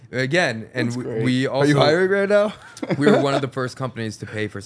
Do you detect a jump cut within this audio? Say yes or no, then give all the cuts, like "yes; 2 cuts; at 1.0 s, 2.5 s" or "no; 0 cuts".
no; 0 cuts